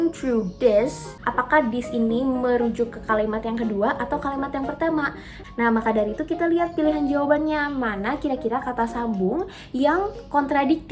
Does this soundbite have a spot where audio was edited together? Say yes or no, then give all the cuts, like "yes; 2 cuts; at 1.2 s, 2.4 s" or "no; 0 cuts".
yes; 2 cuts; at 1.2 s, 5.3 s